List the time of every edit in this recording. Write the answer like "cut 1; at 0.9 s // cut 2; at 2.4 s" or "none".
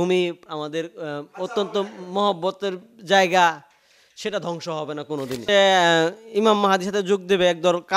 cut 1; at 5.3 s